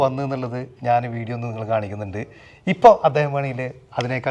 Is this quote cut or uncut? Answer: uncut